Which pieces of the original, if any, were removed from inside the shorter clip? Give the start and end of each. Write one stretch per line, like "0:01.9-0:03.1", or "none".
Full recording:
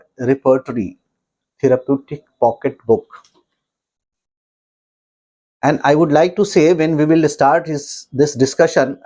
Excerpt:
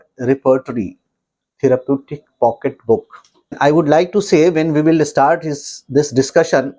0:03.6-0:05.8